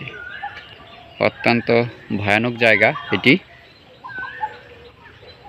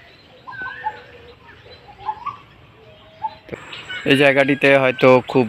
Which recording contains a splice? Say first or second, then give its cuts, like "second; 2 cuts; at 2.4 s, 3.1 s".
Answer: second; 1 cut; at 3.6 s